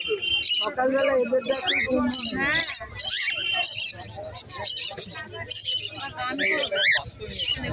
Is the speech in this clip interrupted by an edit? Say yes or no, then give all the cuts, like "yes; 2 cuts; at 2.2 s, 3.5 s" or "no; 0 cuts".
no; 0 cuts